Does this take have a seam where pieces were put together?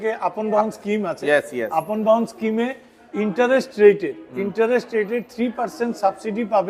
no; 0 cuts

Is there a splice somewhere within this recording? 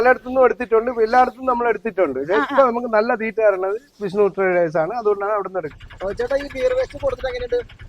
yes; 1 cut; at 5.7 s

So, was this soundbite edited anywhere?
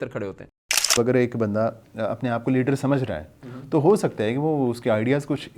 yes; 1 cut; at 1.0 s

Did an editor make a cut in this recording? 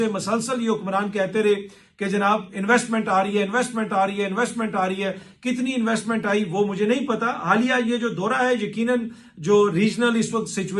no; 0 cuts

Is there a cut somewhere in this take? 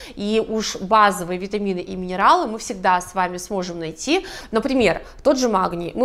yes; 1 cut; at 4.4 s

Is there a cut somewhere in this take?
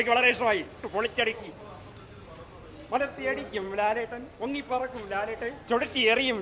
no; 0 cuts

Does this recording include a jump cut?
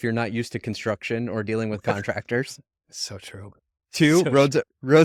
no; 0 cuts

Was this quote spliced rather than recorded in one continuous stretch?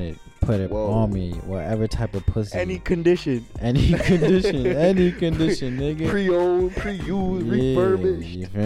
no; 0 cuts

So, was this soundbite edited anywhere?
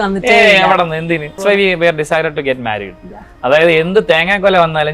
yes; 1 cut; at 1.4 s

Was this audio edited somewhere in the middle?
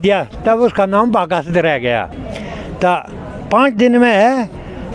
yes; 1 cut; at 2.2 s

